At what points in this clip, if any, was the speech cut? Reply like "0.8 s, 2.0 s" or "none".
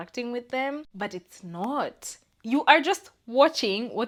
none